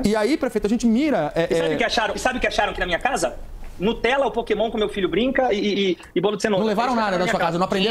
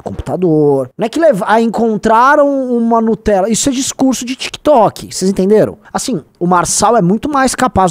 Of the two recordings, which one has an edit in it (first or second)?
second